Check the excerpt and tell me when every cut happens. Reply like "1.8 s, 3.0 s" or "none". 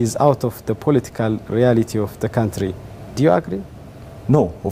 none